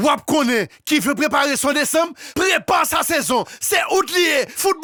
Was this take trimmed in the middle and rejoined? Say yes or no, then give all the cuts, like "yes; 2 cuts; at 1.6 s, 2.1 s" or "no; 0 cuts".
no; 0 cuts